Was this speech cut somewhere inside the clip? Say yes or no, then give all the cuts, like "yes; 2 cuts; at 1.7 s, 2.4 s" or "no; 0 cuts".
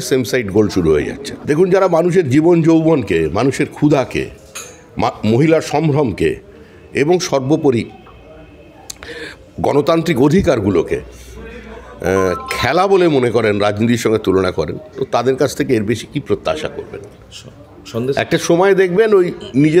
yes; 1 cut; at 1.3 s